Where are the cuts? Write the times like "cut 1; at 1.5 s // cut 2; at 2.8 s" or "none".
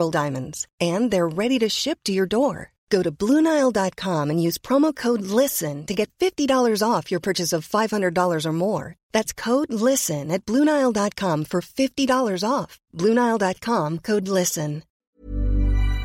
cut 1; at 14.9 s